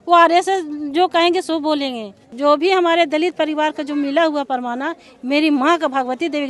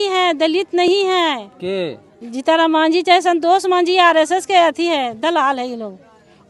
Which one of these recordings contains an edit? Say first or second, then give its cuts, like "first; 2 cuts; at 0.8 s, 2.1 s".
first; 1 cut; at 2.3 s